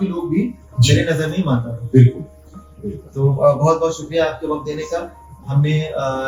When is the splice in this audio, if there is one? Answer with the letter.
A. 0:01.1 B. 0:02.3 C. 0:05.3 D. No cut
D